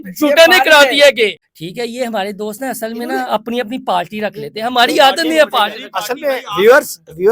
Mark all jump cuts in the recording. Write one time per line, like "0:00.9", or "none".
0:01.4